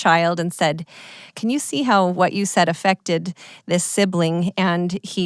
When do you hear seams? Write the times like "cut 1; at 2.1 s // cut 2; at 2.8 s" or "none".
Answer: cut 1; at 1.2 s